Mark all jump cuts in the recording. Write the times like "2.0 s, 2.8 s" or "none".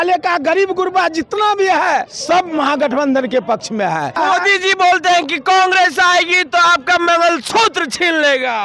2.1 s, 4.2 s